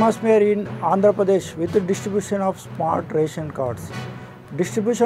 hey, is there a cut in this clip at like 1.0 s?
no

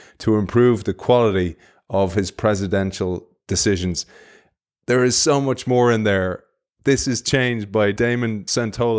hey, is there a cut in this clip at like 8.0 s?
yes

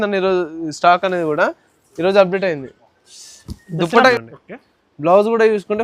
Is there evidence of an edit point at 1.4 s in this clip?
no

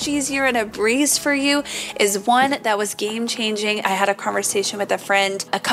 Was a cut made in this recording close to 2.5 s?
no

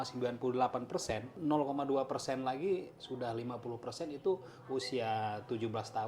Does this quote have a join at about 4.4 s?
no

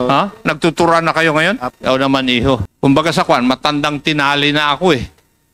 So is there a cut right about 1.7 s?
yes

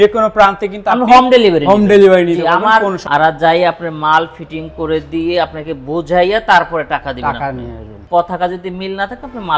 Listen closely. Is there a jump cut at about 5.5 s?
no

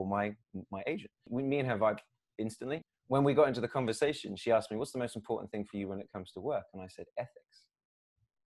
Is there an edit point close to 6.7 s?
no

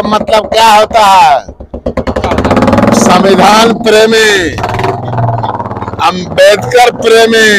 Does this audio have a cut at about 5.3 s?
no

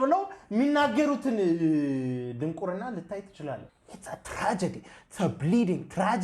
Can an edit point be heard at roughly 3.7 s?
yes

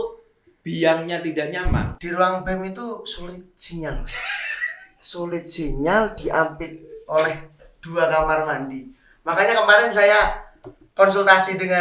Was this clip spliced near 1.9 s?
yes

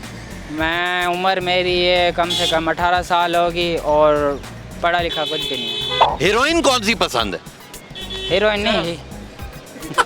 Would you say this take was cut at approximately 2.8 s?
no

